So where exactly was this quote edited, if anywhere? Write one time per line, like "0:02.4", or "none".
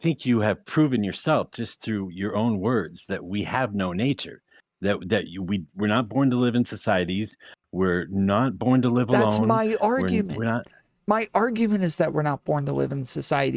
none